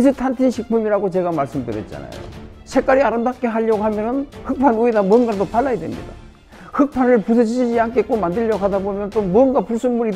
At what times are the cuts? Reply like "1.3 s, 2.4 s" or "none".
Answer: 2.5 s